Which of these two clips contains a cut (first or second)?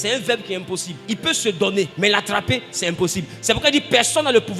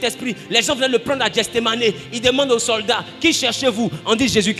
first